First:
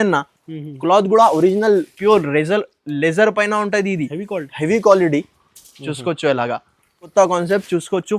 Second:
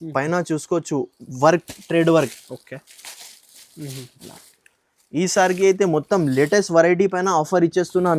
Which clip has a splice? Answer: first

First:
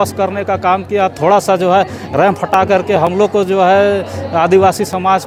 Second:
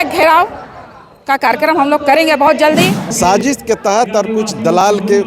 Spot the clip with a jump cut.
second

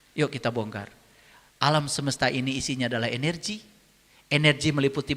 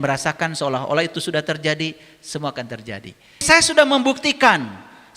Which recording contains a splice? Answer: second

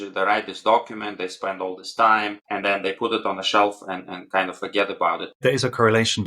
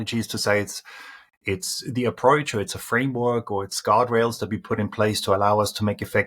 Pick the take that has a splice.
first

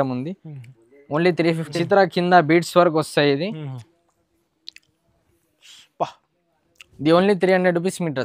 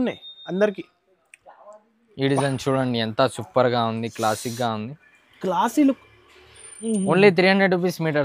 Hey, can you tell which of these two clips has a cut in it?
first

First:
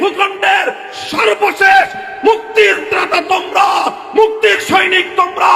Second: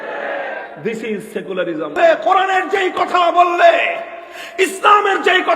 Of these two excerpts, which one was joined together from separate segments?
second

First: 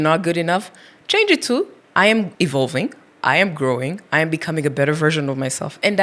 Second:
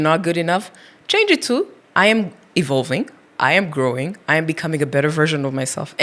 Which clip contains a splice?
first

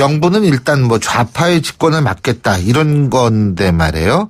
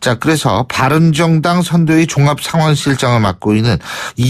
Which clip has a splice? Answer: first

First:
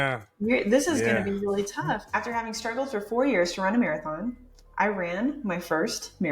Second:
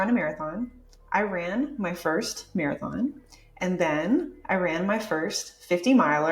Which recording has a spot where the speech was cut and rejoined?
first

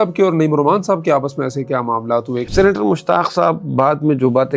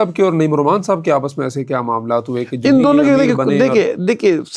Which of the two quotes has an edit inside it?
first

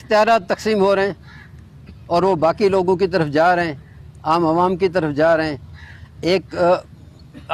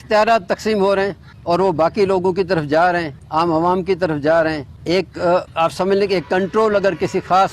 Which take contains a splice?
second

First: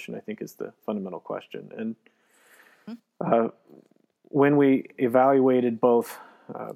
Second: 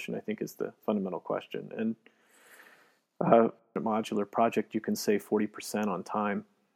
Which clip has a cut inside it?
second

